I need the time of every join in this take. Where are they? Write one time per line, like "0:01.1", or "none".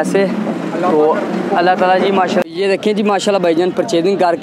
0:02.4

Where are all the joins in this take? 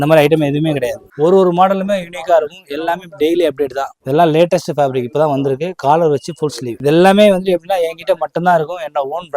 0:01.0
0:03.9
0:06.7

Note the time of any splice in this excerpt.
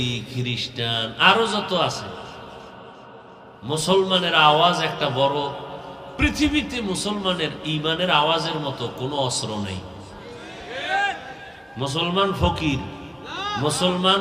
0:03.5

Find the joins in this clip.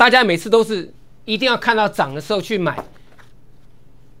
none

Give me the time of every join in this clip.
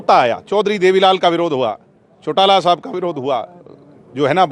none

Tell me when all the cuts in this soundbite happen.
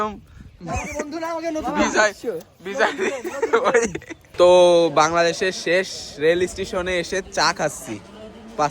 0:04.2

